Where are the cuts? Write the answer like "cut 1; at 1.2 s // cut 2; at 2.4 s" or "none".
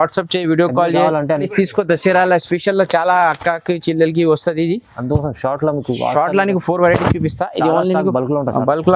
cut 1; at 1.5 s